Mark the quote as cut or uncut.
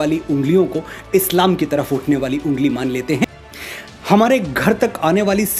cut